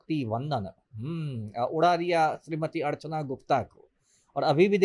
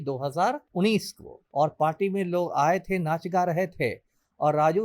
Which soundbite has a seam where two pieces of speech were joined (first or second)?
second